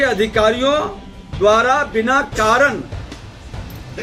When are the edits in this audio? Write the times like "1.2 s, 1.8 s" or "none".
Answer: none

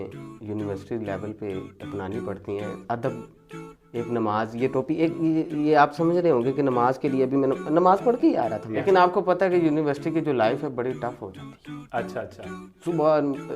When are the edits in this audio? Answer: 8.8 s

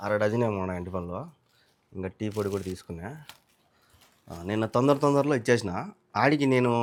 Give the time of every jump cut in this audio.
none

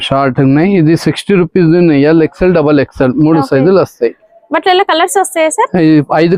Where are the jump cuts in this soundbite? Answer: none

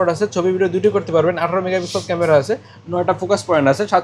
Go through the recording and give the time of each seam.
none

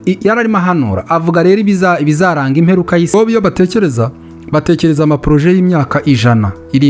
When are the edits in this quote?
3.1 s

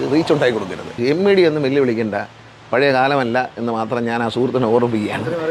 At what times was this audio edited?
0.9 s

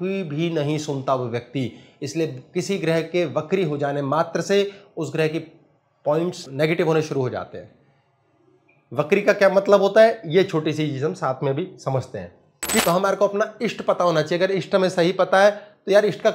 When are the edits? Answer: 12.8 s

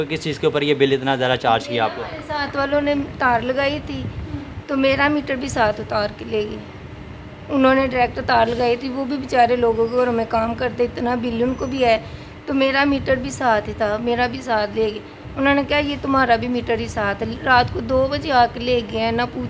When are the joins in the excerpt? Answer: none

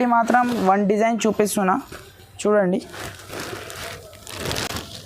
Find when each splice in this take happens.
none

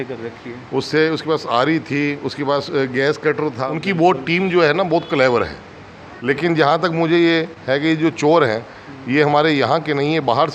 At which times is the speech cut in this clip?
3.7 s, 6.1 s

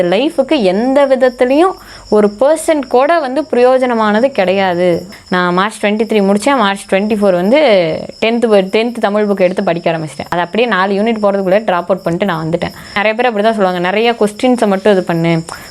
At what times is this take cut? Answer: 5.1 s, 10.3 s, 13.0 s

